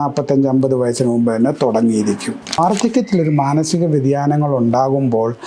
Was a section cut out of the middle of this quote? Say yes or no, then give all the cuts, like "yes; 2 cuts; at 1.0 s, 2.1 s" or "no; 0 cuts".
yes; 1 cut; at 2.6 s